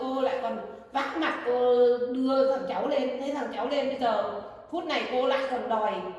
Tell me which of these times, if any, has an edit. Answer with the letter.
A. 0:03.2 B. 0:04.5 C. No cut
C